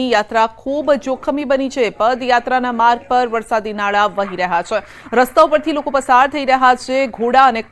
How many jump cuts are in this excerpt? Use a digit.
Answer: 1